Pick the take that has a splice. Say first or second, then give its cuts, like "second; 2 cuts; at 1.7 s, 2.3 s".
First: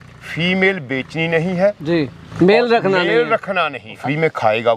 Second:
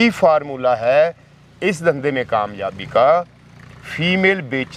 first; 2 cuts; at 2.2 s, 4.0 s